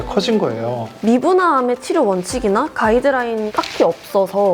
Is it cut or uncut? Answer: cut